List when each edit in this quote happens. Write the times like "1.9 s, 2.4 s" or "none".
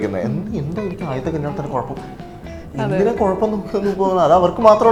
none